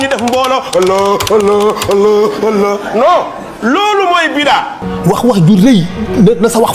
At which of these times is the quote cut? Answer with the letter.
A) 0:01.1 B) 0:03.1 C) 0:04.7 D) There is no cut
C